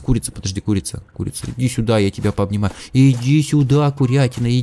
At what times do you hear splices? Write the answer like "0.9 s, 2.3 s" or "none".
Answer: none